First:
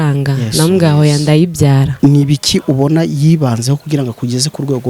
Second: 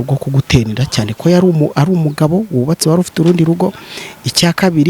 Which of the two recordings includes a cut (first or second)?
first